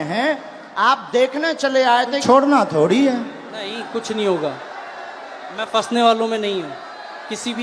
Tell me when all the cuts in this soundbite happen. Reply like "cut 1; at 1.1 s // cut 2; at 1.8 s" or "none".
cut 1; at 2.2 s